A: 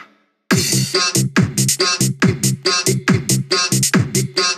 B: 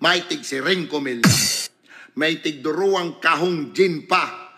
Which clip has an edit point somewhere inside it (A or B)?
B